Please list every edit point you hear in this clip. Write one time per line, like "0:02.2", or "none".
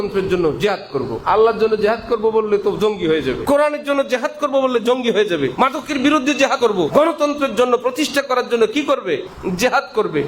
0:01.2
0:03.4
0:05.5
0:06.7
0:09.3